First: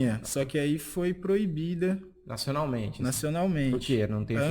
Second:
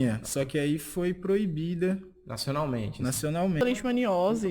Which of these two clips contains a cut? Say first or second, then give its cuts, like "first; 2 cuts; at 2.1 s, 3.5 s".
second; 1 cut; at 3.6 s